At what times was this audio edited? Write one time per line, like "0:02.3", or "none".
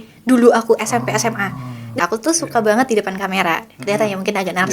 0:02.0